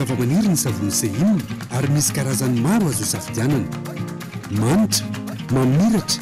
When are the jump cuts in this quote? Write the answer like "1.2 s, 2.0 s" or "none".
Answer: none